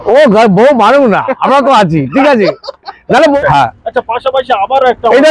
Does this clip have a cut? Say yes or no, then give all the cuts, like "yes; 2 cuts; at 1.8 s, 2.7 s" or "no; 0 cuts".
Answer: yes; 1 cut; at 3.4 s